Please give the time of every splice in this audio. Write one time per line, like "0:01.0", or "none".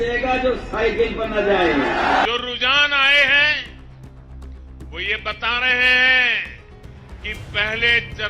0:02.3